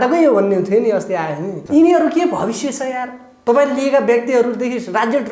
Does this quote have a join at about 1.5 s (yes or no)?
yes